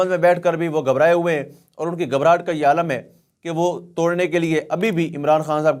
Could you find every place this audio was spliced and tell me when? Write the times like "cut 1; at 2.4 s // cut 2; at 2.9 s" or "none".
none

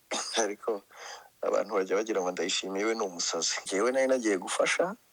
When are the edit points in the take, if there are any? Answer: cut 1; at 3.6 s

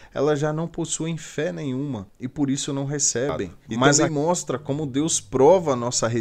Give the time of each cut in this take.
cut 1; at 4.0 s

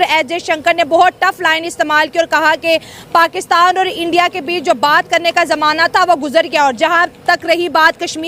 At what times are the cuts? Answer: none

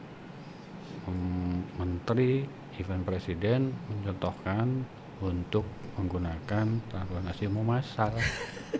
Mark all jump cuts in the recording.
none

